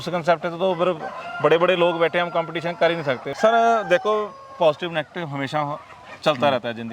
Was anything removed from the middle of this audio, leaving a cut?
yes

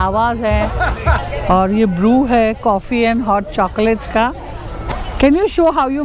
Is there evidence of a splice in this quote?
yes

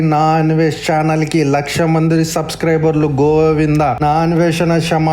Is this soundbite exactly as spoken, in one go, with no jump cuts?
no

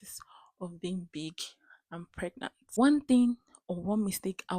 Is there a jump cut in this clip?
yes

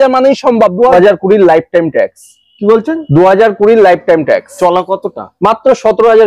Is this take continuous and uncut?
no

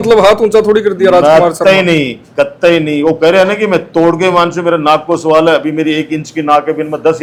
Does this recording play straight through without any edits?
yes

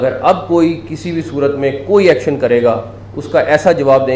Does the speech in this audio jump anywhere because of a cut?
no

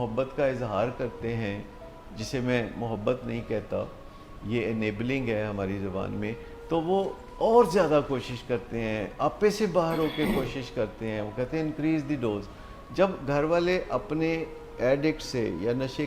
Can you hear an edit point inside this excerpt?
no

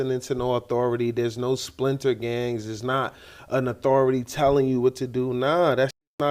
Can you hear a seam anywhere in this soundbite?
no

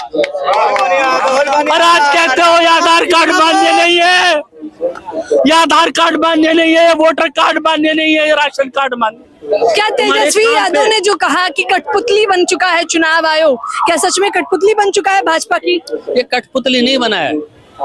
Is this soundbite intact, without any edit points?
no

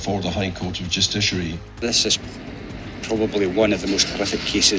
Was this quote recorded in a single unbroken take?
no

